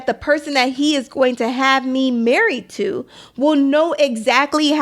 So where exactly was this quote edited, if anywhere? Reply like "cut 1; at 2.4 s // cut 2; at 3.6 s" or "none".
none